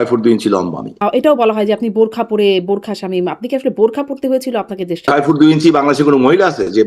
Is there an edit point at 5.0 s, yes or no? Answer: yes